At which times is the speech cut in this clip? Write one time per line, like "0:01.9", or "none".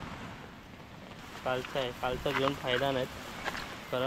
0:01.2